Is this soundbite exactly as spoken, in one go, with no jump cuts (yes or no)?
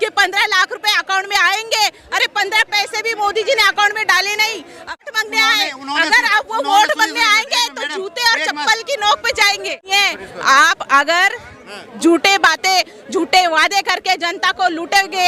no